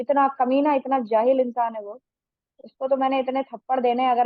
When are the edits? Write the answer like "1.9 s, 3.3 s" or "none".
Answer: none